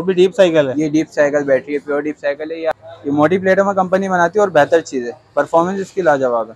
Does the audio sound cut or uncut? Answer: cut